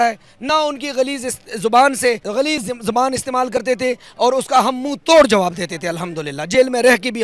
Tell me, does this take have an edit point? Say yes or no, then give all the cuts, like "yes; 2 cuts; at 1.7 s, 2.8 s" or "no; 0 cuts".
yes; 1 cut; at 2.2 s